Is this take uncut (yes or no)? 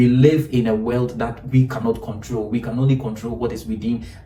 yes